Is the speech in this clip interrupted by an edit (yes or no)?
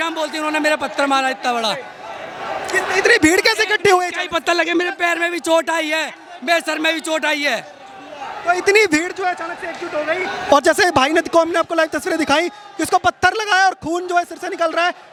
no